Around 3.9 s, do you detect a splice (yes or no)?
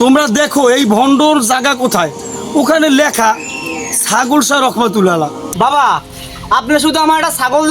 no